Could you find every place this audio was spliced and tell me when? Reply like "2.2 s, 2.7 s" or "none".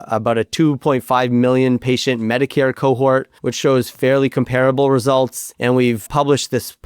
3.4 s, 5.4 s